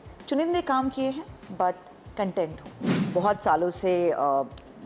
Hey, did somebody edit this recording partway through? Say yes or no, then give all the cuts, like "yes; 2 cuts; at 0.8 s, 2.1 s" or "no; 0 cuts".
yes; 1 cut; at 3.1 s